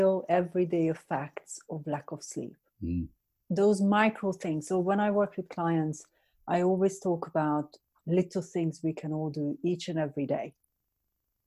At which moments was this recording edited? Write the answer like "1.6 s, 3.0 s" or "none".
none